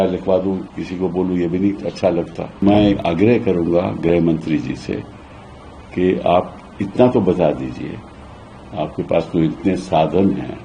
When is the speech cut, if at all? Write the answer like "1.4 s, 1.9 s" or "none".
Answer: 2.6 s